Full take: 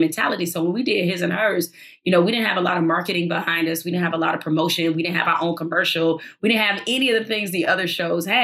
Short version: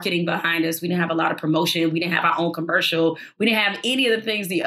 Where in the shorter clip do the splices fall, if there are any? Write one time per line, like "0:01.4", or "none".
none